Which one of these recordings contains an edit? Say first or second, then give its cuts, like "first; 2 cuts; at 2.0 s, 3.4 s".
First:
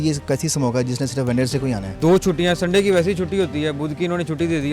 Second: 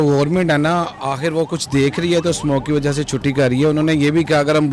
first; 1 cut; at 1.9 s